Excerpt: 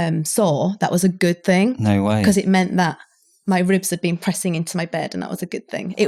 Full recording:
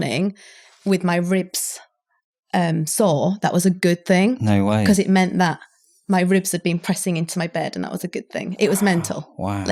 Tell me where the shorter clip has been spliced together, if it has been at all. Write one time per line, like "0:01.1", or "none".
none